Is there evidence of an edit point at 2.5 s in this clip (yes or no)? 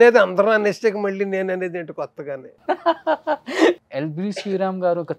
no